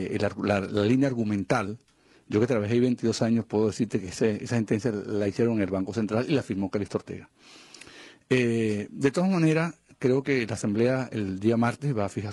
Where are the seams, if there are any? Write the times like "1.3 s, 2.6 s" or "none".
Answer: none